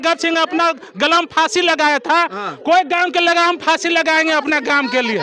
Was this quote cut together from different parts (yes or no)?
no